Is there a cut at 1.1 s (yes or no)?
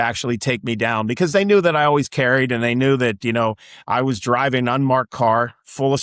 no